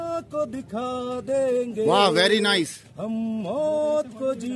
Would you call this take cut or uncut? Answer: uncut